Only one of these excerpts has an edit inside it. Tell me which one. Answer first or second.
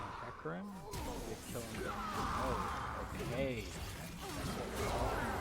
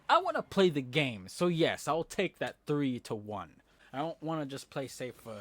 second